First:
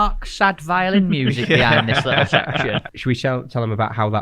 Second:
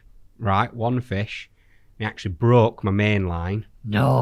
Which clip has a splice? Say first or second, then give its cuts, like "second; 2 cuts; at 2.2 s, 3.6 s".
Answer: first; 1 cut; at 2.9 s